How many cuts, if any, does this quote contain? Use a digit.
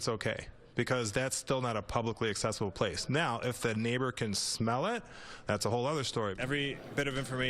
1